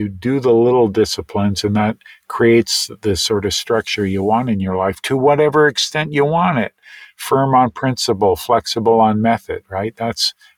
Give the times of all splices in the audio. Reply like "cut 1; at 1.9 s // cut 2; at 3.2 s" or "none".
none

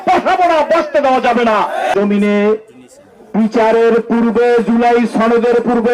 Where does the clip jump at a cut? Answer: cut 1; at 1.9 s

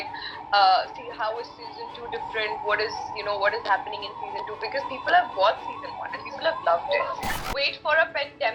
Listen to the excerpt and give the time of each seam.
cut 1; at 7.4 s

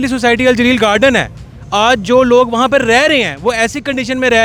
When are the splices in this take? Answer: none

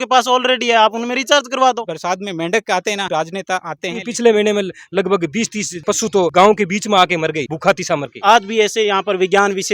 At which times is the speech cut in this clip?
cut 1; at 1.8 s // cut 2; at 4.1 s // cut 3; at 8.1 s

